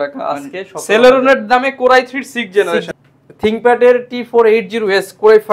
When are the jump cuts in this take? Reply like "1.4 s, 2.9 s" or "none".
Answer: 2.8 s